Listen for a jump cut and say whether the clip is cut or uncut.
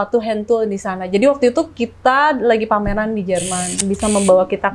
cut